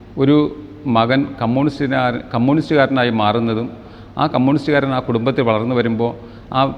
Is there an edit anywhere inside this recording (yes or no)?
no